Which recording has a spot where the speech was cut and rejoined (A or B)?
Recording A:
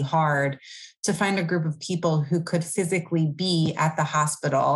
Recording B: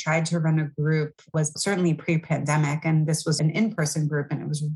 B